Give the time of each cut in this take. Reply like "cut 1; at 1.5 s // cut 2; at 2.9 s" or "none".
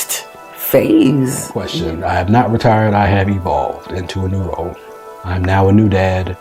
cut 1; at 1.6 s